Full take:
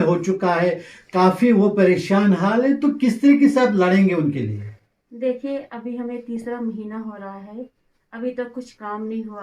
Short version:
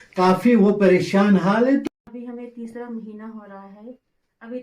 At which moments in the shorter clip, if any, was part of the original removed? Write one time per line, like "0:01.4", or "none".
0:01.8